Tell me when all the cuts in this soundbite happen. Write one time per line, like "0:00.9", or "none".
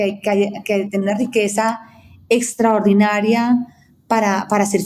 none